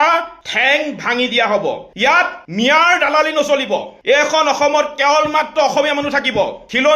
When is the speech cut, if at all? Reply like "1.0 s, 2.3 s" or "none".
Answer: 2.2 s